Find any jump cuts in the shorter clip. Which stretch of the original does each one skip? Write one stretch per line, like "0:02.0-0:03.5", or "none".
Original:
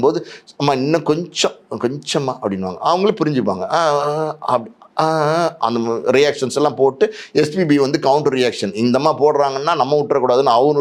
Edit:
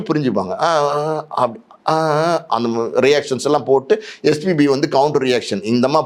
none

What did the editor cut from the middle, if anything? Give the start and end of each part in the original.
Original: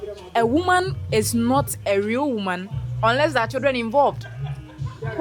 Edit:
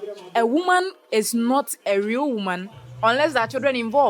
none

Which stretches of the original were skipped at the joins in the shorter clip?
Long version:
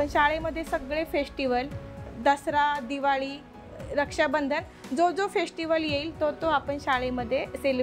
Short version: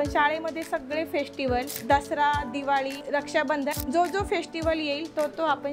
0:01.7-0:02.1
0:03.9-0:04.6

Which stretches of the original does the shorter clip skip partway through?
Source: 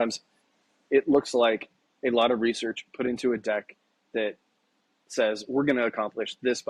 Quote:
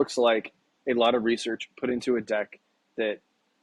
none

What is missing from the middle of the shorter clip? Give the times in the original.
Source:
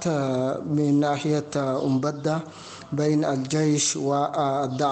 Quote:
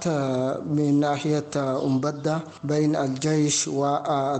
0:02.5-0:02.8

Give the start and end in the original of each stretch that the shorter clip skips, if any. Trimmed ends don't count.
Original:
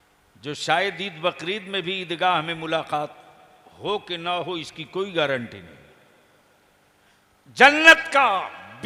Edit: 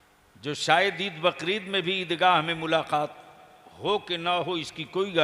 none

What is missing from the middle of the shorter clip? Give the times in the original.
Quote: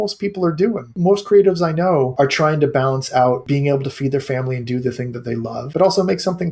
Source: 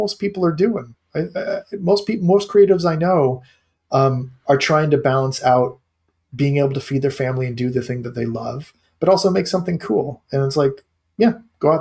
0:01.0-0:02.2
0:03.3-0:04.4
0:05.7-0:06.3
0:08.5-0:08.9

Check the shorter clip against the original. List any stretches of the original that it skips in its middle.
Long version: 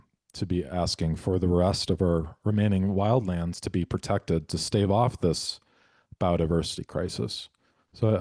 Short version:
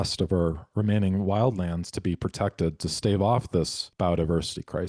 0:05.5-0:06.0

